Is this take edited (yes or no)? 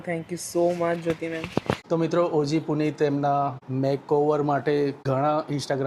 yes